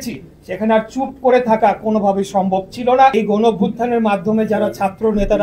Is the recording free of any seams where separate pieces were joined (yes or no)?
no